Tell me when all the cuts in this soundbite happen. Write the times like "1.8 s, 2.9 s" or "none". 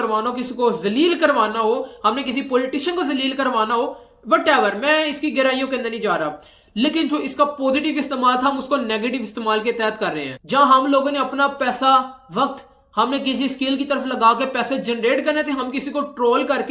none